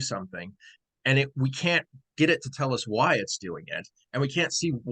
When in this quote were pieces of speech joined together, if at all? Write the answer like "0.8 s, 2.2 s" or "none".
none